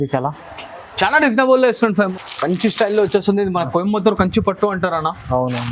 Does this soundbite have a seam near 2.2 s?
yes; 1 cut; at 2.2 s

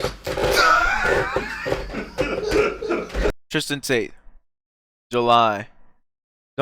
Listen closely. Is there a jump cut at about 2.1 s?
no; 1 cut; at 3.4 s

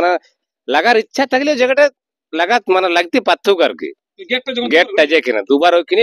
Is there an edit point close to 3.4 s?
no; 0 cuts

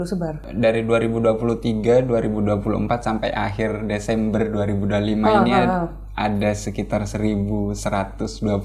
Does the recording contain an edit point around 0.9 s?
no; 0 cuts

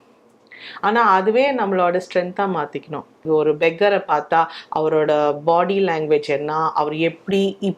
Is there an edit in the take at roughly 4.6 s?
no; 1 cut; at 3.2 s

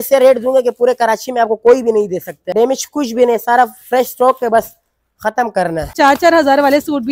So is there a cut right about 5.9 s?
yes; 2 cuts; at 2.5 s, 5.9 s

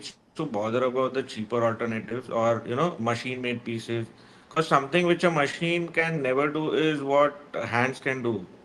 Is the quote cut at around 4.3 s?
no; 0 cuts

